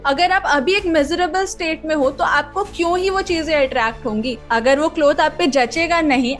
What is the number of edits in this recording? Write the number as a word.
one